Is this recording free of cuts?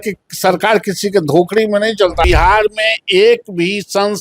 no; 1 cut; at 2.2 s

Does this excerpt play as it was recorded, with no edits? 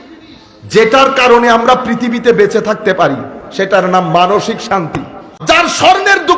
no; 1 cut; at 5.2 s

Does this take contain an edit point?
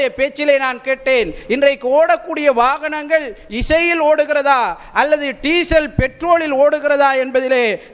no; 0 cuts

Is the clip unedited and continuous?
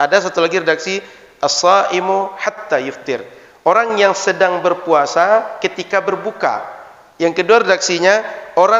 yes; 0 cuts

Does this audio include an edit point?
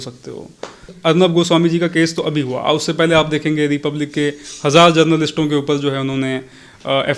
yes; 1 cut; at 0.9 s

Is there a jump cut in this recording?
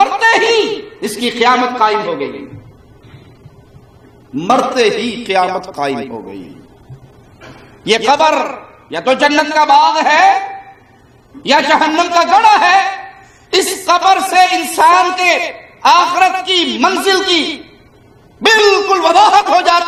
no; 0 cuts

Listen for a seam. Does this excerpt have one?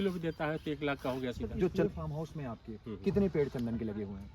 yes; 1 cut; at 1.8 s

